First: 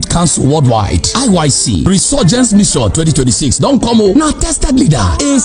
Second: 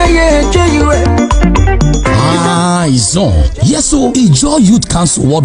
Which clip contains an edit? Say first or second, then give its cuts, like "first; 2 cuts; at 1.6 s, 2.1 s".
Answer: second; 1 cut; at 2.3 s